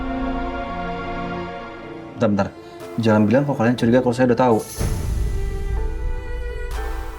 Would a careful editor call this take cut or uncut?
cut